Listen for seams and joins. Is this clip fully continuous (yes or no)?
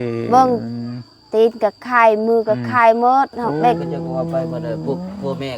no